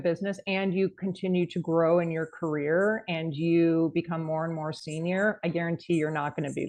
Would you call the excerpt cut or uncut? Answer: uncut